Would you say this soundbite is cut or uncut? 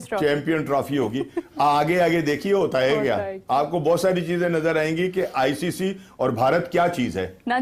uncut